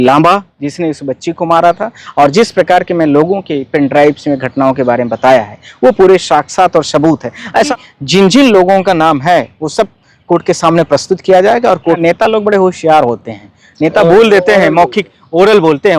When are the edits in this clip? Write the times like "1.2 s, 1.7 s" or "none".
7.7 s, 12.0 s